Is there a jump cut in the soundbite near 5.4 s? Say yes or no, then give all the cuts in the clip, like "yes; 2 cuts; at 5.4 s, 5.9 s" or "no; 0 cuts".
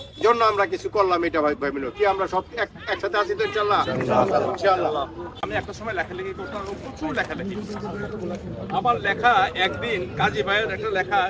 yes; 1 cut; at 5.4 s